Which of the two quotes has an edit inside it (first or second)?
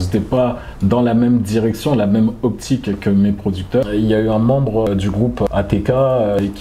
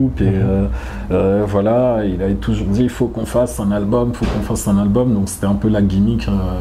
first